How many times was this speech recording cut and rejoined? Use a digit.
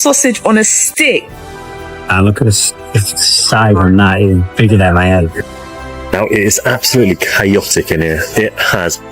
2